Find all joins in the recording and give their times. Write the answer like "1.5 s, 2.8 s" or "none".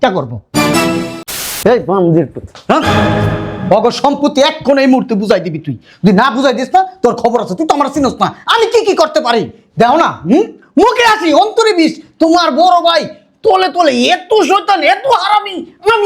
1.4 s